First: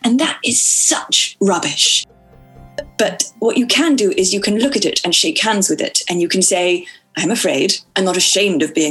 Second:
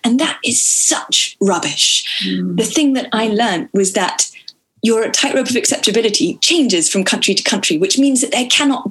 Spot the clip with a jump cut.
first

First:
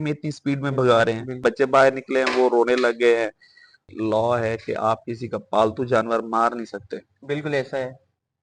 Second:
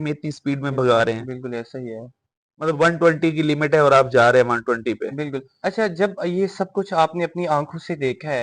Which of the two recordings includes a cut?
first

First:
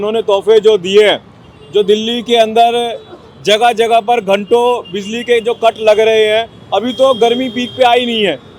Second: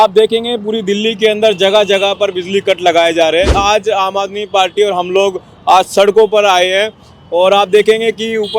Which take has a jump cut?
second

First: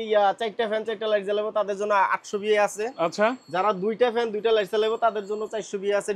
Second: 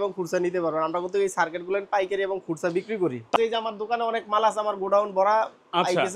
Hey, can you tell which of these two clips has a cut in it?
second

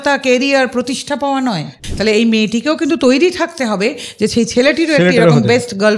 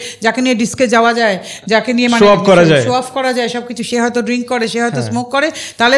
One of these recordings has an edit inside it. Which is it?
first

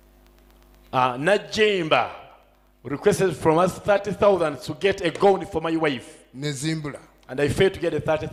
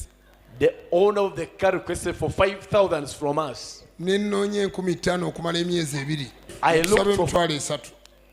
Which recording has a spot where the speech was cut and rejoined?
second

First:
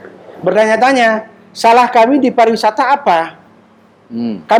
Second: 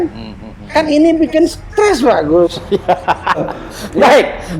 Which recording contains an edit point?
second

